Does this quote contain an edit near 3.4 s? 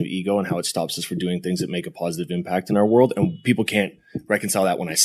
yes; 1 cut; at 3.4 s

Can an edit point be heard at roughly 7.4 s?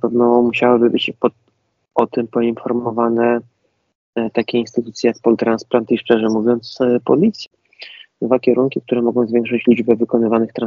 yes; 1 cut; at 7.4 s

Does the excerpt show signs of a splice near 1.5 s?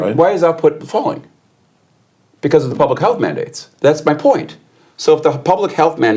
no; 1 cut; at 3.6 s

